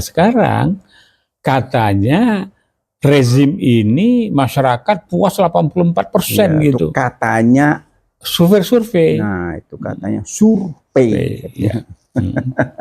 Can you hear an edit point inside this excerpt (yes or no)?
no